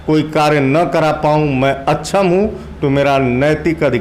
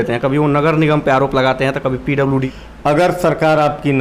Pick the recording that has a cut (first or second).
second